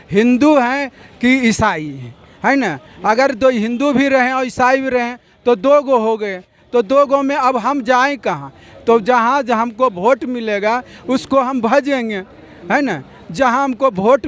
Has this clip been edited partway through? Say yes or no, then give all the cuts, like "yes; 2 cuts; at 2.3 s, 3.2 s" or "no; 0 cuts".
no; 0 cuts